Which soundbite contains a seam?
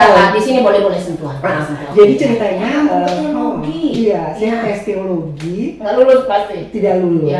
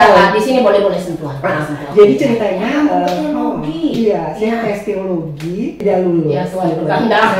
second; 1 cut; at 5.7 s

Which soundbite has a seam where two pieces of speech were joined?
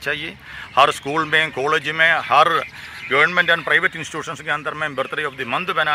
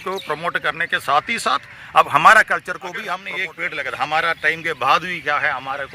second; 1 cut; at 3.1 s

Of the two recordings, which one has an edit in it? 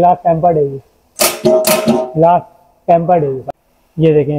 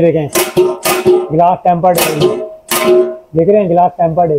first; 1 cut; at 3.4 s

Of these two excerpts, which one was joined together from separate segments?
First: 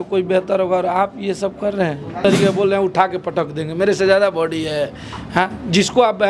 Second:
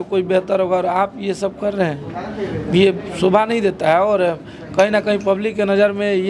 first; 1 cut; at 2.2 s

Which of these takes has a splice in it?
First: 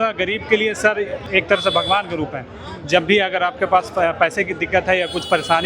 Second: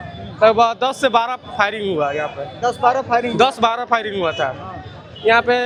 first; 1 cut; at 1.2 s

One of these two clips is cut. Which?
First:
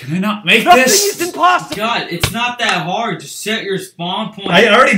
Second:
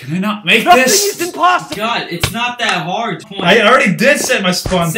second; 1 cut; at 3.3 s

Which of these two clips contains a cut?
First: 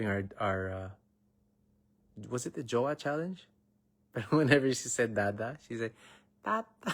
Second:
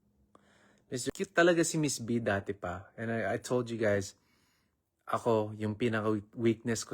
second; 1 cut; at 1.0 s

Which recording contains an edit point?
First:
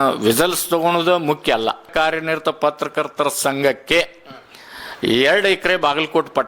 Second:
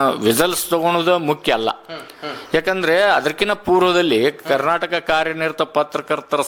first; 1 cut; at 1.9 s

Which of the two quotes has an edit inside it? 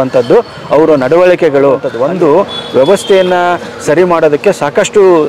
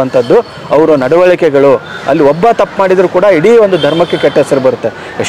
first; 1 cut; at 1.9 s

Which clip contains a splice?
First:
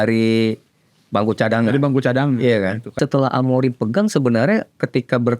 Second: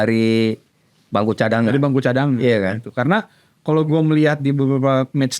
first; 1 cut; at 3.0 s

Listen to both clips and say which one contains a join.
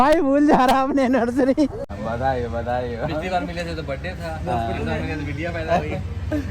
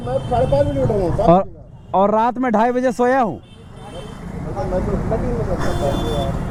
first; 1 cut; at 1.9 s

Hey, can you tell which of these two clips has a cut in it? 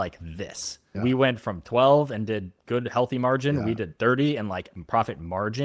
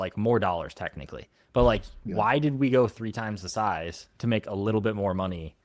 first; 1 cut; at 0.9 s

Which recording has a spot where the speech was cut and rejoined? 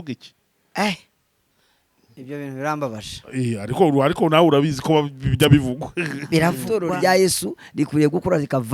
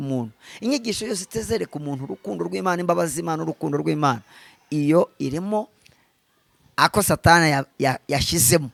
first; 1 cut; at 6.6 s

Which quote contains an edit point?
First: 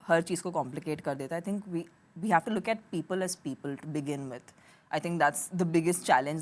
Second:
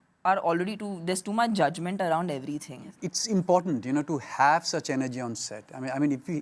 second; 1 cut; at 2.9 s

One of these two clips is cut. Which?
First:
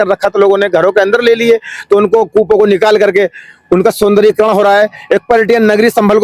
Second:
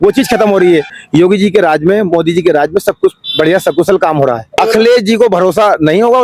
second; 2 cuts; at 1.0 s, 4.6 s

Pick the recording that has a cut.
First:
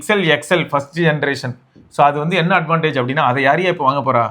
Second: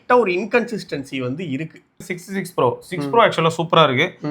second; 1 cut; at 2.2 s

